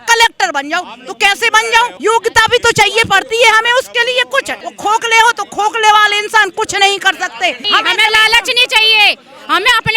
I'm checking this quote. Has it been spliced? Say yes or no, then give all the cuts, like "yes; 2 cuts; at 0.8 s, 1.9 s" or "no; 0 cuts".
yes; 3 cuts; at 1.9 s, 4.6 s, 7.6 s